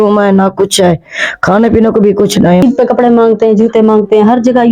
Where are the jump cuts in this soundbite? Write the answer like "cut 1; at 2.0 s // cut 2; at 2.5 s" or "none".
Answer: cut 1; at 2.6 s